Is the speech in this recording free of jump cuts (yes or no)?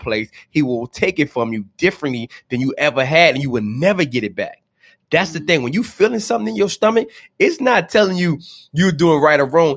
yes